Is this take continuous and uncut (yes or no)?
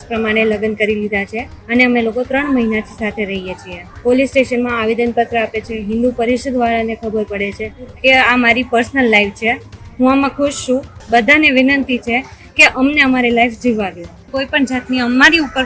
no